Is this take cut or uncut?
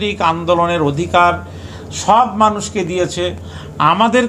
uncut